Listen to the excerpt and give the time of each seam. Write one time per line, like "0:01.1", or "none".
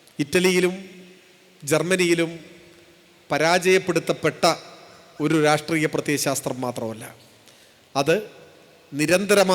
none